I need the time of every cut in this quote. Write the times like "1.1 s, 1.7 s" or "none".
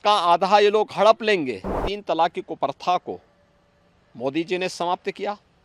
1.9 s